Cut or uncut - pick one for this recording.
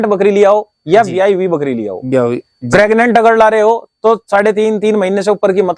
uncut